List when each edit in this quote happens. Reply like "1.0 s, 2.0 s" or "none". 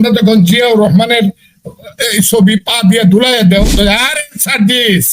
3.8 s